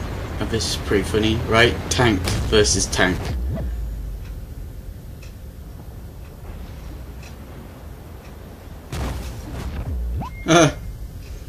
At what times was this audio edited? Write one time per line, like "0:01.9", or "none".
0:01.6